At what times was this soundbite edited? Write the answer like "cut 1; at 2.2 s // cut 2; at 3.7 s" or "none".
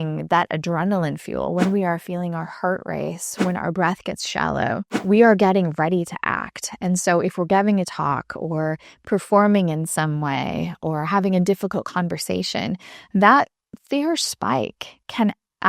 cut 1; at 4.9 s